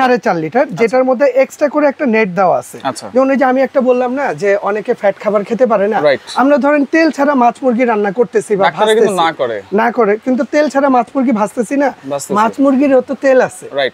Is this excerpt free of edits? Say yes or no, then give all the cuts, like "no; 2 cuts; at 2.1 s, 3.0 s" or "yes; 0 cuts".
yes; 0 cuts